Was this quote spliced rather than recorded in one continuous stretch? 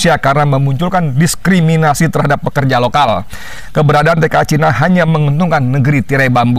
no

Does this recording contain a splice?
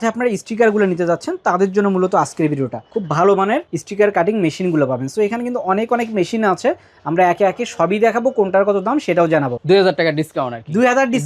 yes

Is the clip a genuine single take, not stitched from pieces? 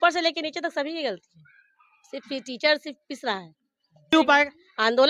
no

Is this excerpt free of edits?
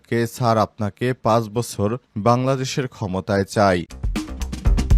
no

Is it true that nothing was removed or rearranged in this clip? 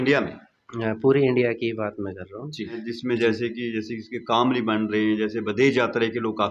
no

